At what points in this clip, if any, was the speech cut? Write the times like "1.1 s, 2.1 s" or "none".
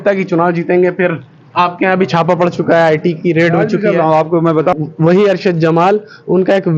4.7 s